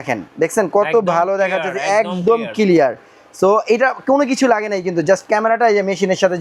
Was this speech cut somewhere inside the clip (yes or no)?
no